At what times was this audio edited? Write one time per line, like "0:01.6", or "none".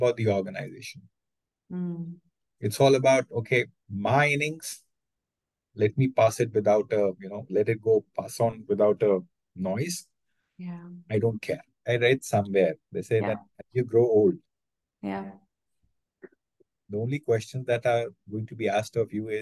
0:11.8